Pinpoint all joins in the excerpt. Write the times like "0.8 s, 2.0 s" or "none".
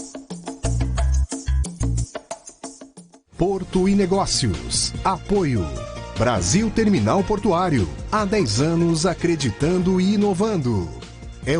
2.9 s